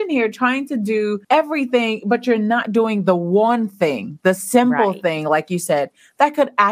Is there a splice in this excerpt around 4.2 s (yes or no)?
no